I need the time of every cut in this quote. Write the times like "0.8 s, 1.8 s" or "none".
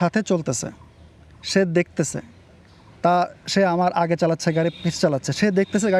none